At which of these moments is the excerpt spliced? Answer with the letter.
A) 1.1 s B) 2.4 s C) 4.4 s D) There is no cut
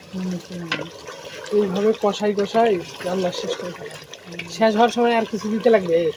D